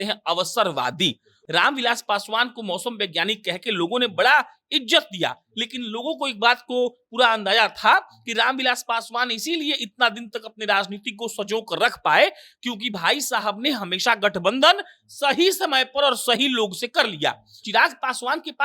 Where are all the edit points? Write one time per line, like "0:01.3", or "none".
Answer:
0:01.3
0:17.5